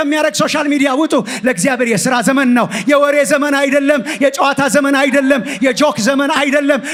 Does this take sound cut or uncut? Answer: uncut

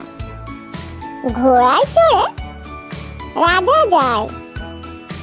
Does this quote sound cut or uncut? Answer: cut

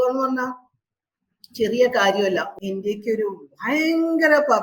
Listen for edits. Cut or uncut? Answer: cut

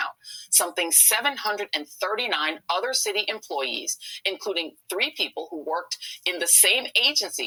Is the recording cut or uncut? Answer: uncut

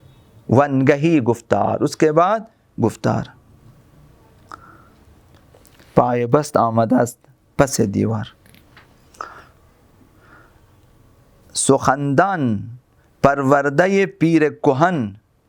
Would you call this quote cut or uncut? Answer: uncut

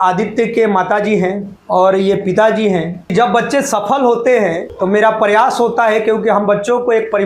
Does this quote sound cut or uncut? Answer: cut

